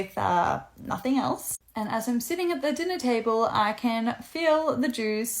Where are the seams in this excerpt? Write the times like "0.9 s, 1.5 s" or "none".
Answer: 3.3 s